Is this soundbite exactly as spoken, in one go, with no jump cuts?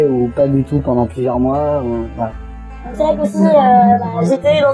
yes; 0 cuts

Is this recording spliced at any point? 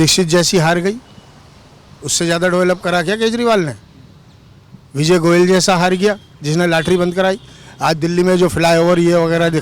no; 0 cuts

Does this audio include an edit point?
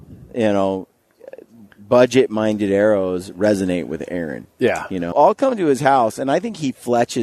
yes; 1 cut; at 5.1 s

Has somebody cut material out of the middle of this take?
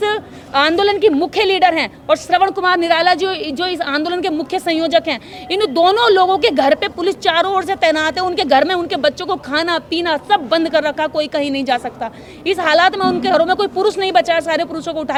no; 0 cuts

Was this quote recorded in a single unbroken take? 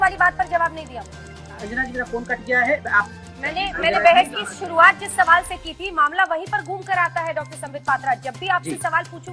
no; 2 cuts; at 1.5 s, 3.1 s

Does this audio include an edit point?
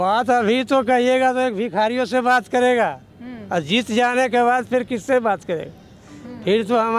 no; 0 cuts

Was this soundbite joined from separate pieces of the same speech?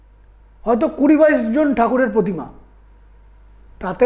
no; 0 cuts

